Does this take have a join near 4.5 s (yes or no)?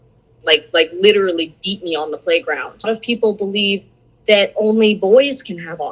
no